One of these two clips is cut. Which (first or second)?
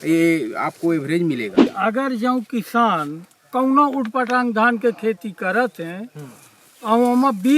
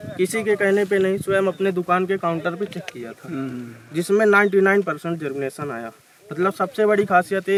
first